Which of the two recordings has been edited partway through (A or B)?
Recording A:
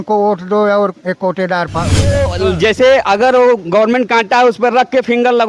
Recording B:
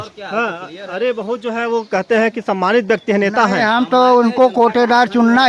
A